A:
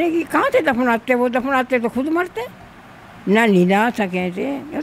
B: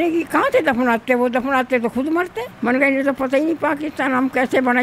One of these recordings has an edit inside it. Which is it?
B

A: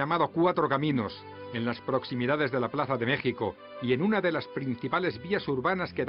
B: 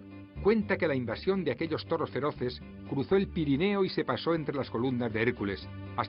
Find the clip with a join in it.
B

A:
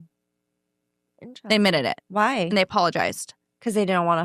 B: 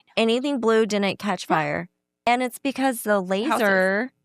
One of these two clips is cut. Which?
B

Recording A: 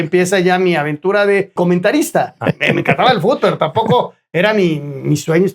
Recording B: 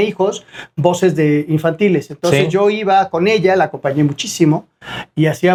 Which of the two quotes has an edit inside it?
A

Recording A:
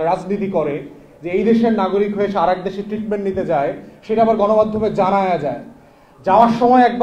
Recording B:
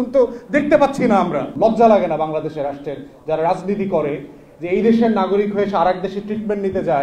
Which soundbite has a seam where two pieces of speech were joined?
B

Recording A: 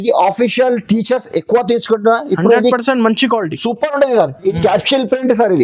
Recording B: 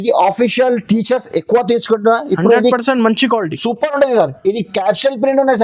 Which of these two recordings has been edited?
A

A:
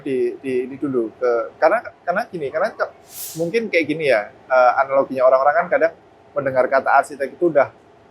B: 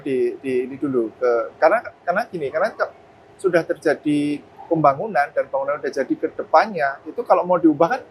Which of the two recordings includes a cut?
A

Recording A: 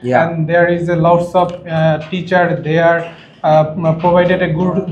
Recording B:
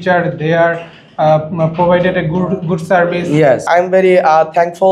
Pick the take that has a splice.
B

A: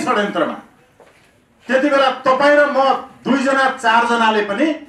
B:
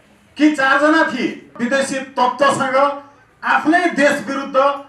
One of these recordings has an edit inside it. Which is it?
B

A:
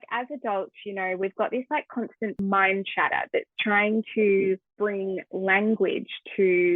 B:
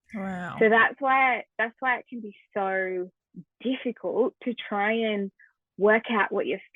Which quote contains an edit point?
A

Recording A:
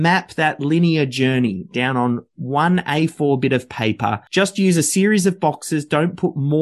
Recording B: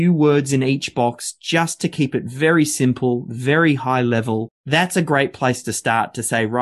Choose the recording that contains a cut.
A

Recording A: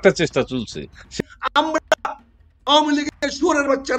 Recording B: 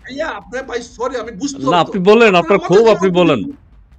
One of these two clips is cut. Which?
A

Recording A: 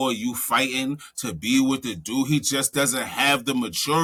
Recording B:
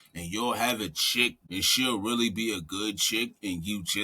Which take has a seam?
B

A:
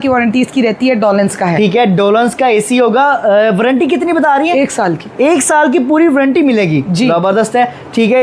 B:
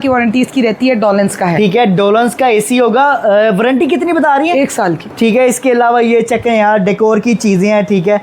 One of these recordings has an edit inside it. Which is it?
B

